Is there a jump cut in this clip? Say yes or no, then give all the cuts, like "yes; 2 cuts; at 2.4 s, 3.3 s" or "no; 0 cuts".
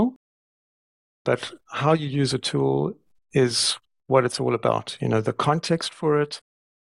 no; 0 cuts